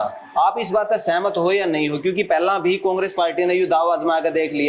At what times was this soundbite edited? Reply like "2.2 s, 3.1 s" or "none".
none